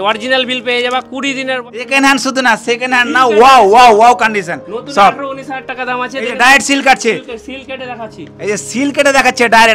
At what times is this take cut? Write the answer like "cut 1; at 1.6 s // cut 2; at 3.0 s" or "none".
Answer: cut 1; at 1.6 s